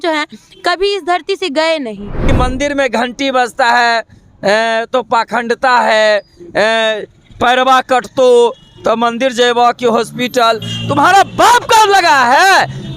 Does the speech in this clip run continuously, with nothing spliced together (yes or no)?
no